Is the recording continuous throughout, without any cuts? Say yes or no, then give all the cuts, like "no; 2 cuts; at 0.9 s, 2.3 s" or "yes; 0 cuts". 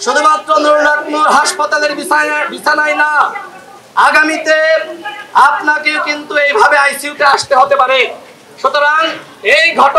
yes; 0 cuts